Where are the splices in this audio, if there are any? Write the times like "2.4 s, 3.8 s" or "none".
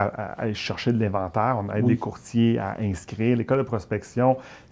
none